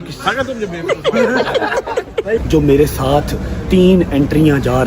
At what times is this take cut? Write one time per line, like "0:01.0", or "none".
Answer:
0:02.4